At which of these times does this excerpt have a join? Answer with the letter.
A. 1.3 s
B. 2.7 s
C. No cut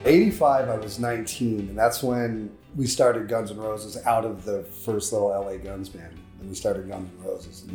B